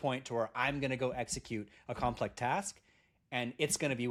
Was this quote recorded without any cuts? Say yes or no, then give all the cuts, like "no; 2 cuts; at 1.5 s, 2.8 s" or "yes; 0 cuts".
yes; 0 cuts